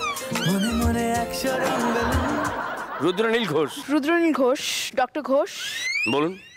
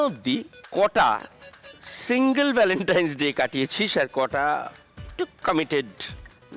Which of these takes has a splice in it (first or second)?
first